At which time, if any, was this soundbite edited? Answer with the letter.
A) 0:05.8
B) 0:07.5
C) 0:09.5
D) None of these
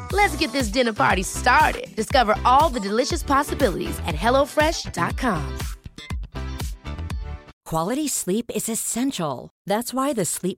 B